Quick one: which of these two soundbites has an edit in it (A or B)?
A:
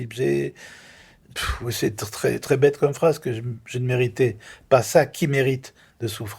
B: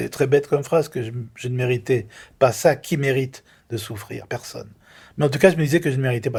A